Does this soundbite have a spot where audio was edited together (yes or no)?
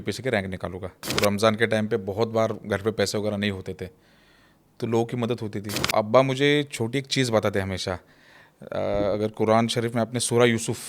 yes